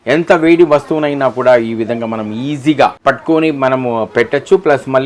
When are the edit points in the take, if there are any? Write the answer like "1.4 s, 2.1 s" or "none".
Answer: 3.0 s